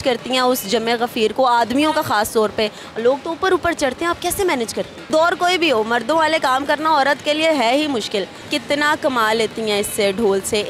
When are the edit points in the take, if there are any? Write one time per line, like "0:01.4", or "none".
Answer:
0:05.1
0:08.5